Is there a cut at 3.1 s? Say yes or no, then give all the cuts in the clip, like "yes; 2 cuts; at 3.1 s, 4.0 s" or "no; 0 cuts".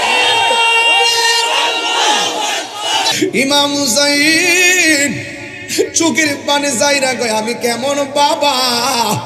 yes; 1 cut; at 3.1 s